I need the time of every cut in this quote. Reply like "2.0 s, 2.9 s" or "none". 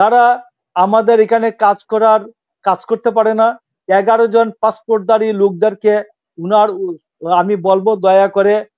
none